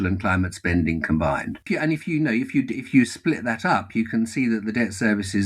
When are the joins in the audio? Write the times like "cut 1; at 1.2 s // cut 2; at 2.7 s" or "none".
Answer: cut 1; at 1.7 s

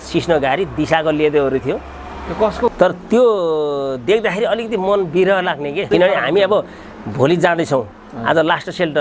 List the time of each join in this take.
cut 1; at 2.7 s // cut 2; at 5.9 s

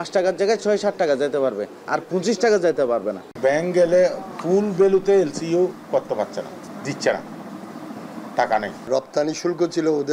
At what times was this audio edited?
cut 1; at 3.2 s // cut 2; at 6.7 s // cut 3; at 8.9 s

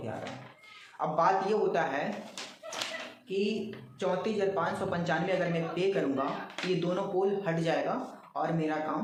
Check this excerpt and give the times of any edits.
none

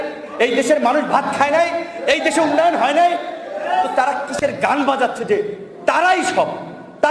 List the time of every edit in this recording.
none

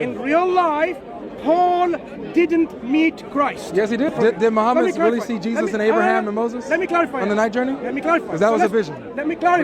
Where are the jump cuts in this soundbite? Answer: cut 1; at 4.1 s

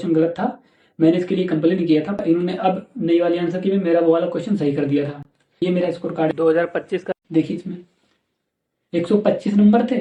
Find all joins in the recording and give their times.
none

